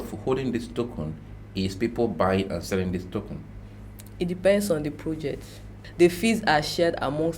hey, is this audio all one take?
no; 1 cut; at 5.8 s

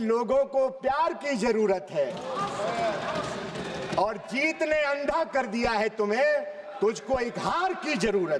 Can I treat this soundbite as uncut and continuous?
yes; 0 cuts

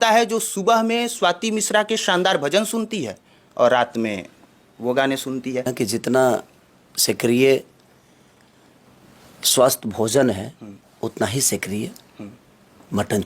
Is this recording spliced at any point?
yes; 1 cut; at 5.7 s

